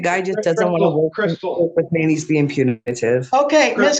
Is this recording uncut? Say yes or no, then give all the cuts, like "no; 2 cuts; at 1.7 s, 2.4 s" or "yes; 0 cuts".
yes; 0 cuts